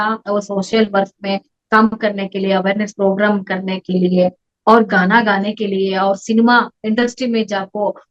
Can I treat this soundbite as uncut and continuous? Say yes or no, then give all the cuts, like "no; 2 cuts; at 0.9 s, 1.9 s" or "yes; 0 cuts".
yes; 0 cuts